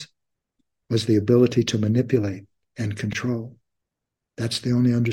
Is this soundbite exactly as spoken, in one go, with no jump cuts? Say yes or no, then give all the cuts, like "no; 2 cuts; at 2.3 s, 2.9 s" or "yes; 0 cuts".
yes; 0 cuts